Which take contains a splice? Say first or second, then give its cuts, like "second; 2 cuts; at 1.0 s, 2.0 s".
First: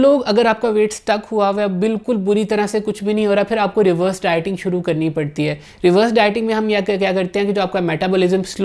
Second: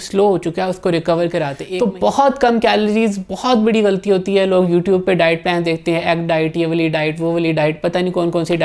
second; 1 cut; at 1.6 s